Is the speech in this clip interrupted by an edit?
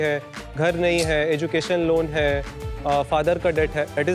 no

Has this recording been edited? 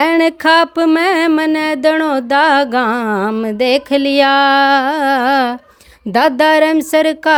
no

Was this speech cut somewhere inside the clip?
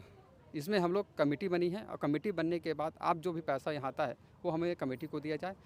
no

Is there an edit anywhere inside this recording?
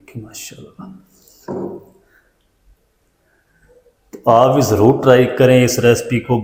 no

